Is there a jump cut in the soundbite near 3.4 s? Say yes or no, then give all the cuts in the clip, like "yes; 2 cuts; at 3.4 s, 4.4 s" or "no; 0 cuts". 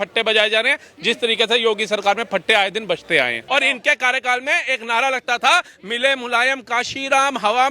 yes; 1 cut; at 3.4 s